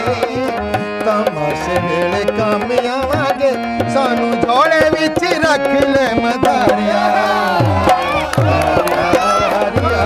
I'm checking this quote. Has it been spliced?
no; 0 cuts

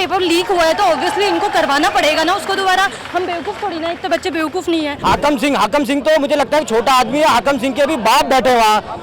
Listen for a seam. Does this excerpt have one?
yes; 1 cut; at 4.9 s

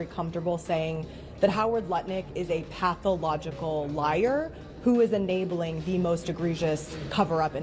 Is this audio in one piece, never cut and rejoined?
yes; 0 cuts

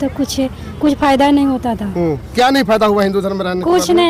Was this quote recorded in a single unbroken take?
yes; 0 cuts

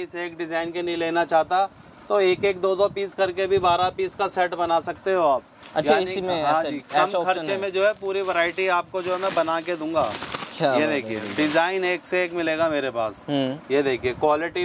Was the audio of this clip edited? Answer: no; 0 cuts

